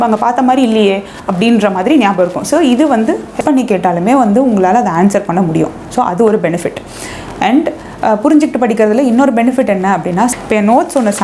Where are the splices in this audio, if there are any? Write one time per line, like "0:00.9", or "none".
0:03.4
0:10.3